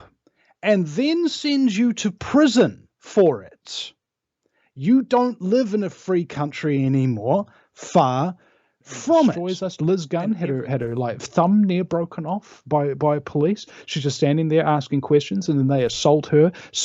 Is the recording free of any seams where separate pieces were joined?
no; 1 cut; at 9.5 s

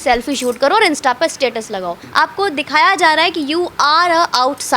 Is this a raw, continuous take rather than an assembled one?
no; 1 cut; at 2.0 s

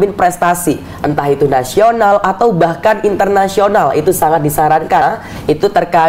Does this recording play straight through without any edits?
no; 1 cut; at 5.0 s

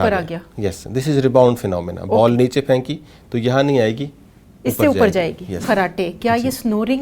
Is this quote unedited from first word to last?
no; 1 cut; at 5.6 s

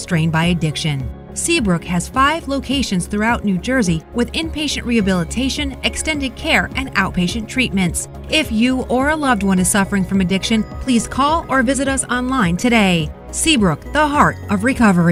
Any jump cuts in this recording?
no; 0 cuts

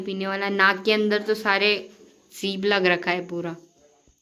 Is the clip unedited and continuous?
yes; 0 cuts

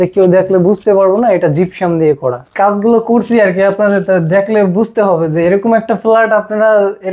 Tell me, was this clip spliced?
yes; 1 cut; at 2.5 s

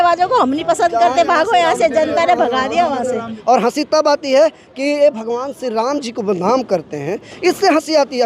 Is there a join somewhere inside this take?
yes; 1 cut; at 3.3 s

